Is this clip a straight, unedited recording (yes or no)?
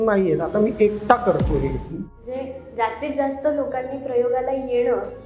no